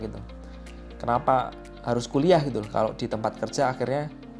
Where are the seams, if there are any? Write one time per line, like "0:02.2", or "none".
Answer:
none